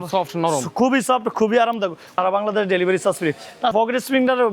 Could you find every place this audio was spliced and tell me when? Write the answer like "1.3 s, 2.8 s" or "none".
2.1 s, 3.7 s

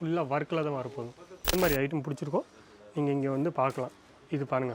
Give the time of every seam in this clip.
1.5 s

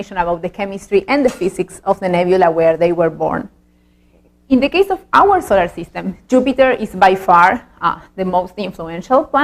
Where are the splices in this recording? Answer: 1.0 s

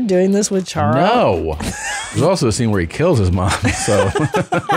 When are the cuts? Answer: 2.2 s

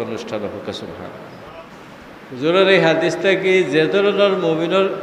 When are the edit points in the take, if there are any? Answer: 1.6 s

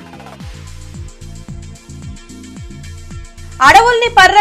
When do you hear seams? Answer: 1.7 s

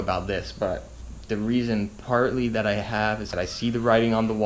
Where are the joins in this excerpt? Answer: 3.3 s

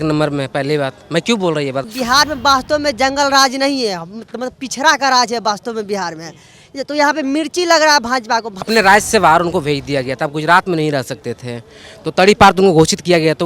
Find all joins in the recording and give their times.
1.9 s, 8.6 s

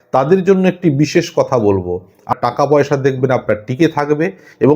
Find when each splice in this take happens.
2.3 s

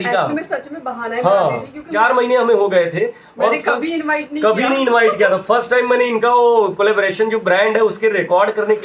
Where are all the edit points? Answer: 1.9 s

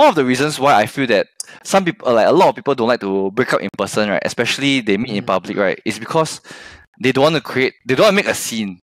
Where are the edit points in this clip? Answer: none

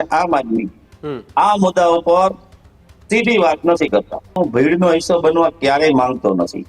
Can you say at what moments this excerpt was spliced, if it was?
4.4 s

